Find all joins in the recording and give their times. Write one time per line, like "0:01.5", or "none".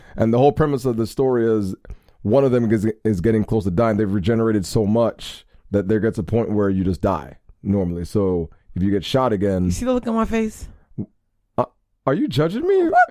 none